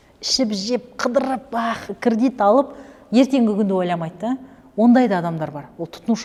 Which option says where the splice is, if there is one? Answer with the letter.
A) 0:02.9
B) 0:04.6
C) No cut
C